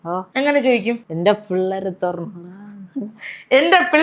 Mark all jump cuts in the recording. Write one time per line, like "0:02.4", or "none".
0:01.1